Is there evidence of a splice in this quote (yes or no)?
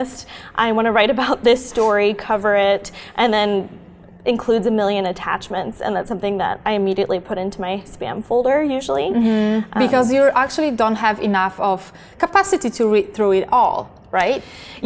no